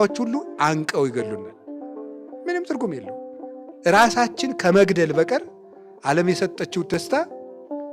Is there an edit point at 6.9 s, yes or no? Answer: yes